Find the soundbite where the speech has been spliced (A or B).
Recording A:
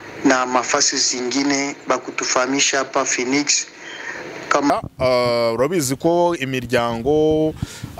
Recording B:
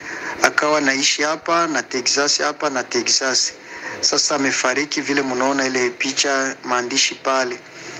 A